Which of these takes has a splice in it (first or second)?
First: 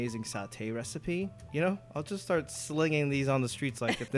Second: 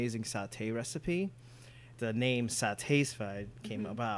first